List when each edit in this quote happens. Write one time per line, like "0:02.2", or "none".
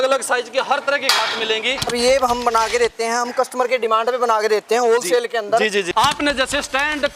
0:01.9
0:05.9